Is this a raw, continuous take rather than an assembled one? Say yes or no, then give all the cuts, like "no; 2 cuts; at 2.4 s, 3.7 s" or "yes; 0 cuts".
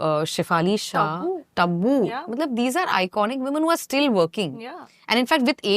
yes; 0 cuts